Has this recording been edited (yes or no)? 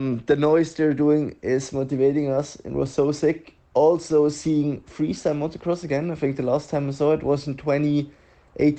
no